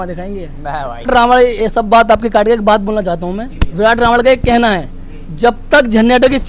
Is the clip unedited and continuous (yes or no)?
no